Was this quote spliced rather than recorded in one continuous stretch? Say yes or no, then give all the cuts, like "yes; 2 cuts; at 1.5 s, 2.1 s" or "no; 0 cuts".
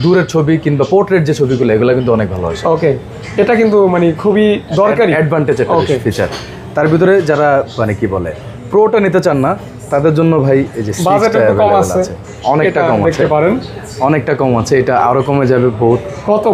no; 0 cuts